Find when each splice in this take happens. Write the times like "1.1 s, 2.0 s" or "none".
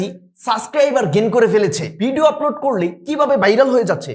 1.9 s